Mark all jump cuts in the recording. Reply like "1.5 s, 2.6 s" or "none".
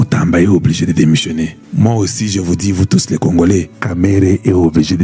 1.6 s, 3.8 s